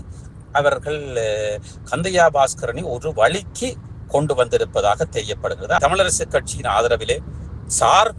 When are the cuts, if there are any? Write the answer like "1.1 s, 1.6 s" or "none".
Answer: 5.8 s